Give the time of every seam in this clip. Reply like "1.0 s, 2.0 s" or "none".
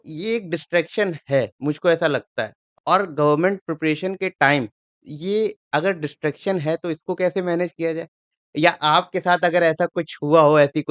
2.7 s